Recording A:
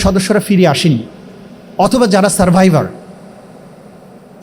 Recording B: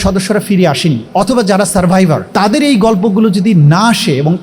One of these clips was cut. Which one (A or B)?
B